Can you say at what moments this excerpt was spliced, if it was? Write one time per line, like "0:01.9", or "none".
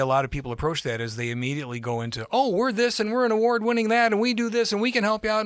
none